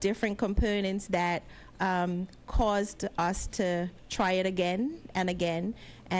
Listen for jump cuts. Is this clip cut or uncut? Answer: uncut